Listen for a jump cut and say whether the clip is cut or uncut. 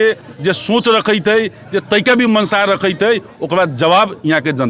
uncut